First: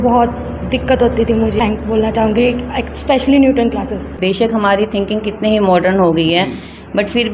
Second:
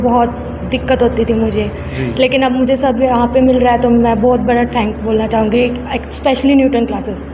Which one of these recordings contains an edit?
first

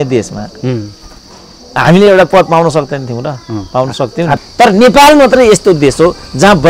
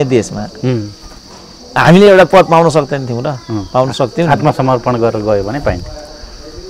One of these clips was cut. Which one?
first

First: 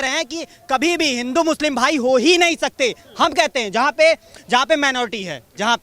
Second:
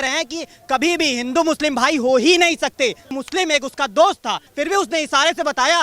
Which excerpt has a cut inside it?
second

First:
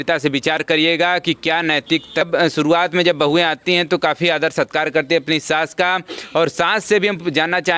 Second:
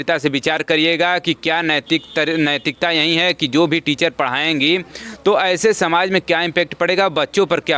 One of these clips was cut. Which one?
first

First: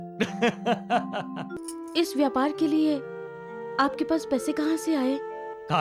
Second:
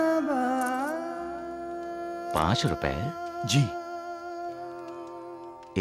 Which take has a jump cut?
first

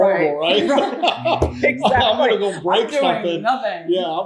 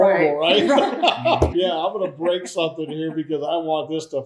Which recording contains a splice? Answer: second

